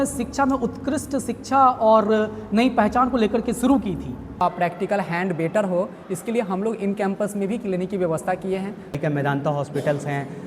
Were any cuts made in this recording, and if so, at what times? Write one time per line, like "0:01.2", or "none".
0:04.4
0:09.0